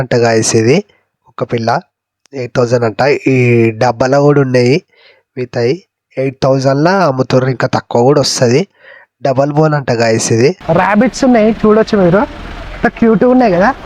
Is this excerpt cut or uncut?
cut